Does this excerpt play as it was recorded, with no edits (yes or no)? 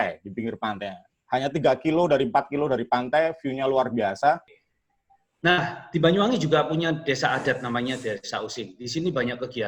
no